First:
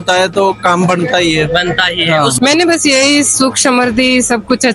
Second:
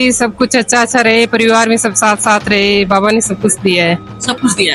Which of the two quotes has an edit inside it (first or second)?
first